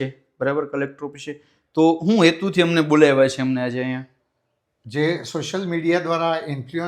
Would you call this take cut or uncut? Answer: uncut